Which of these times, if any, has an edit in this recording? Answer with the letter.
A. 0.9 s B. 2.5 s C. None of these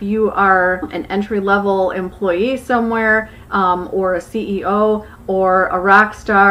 A